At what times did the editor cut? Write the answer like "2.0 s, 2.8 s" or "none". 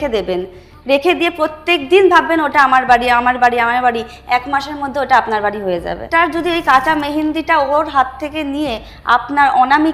6.0 s